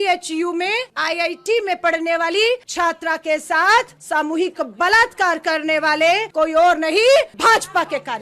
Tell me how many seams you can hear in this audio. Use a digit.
5